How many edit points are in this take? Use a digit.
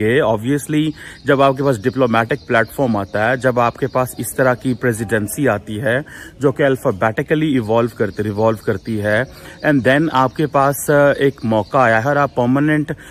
0